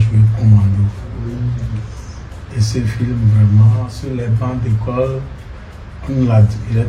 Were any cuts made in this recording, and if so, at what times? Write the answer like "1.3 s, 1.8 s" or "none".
4.0 s